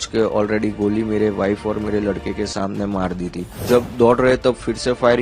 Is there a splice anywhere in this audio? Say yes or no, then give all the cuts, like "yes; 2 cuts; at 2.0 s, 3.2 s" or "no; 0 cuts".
yes; 1 cut; at 3.6 s